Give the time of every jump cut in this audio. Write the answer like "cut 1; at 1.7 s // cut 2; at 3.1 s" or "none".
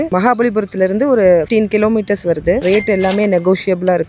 cut 1; at 2.6 s